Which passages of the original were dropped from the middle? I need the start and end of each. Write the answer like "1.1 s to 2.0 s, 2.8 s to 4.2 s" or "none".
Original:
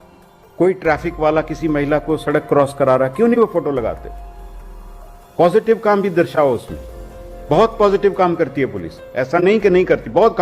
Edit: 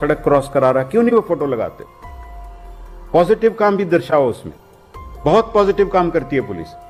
none